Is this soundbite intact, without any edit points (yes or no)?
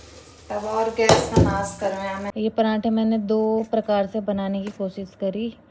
no